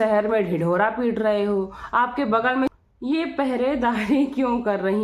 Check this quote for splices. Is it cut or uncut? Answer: cut